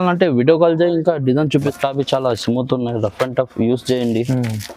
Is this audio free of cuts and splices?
no; 1 cut; at 1.7 s

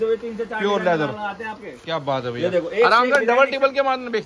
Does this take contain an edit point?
no; 0 cuts

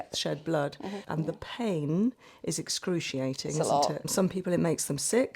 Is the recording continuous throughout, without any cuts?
no; 2 cuts; at 1.0 s, 4.1 s

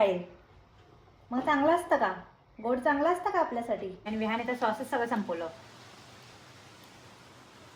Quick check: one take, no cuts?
no; 1 cut; at 4.0 s

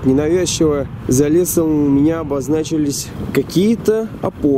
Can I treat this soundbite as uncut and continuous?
no; 2 cuts; at 0.9 s, 3.1 s

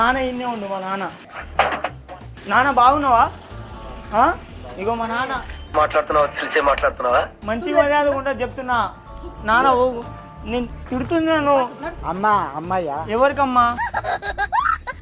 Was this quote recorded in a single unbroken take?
yes; 0 cuts

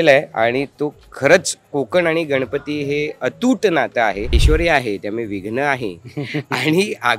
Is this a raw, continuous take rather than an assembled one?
no; 1 cut; at 4.4 s

